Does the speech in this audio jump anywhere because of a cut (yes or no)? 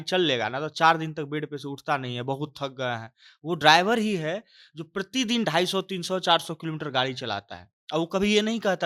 no